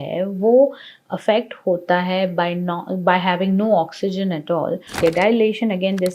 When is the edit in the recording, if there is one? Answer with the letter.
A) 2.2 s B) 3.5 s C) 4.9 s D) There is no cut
C